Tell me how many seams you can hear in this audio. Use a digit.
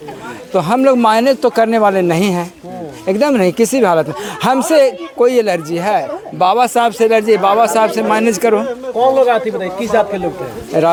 0